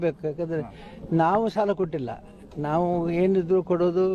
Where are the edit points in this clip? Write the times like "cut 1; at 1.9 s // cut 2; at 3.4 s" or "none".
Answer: none